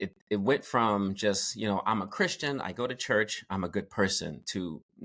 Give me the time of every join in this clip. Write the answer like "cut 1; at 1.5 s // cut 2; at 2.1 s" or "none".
none